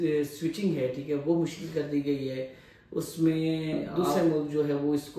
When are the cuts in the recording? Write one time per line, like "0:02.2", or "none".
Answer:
0:03.8